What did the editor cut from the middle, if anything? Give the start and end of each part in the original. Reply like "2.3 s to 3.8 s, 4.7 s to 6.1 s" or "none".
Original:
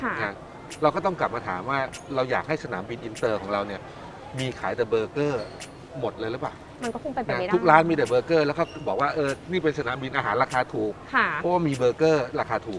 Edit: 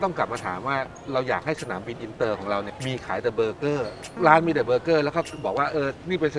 3.8 s to 4.3 s, 5.7 s to 7.6 s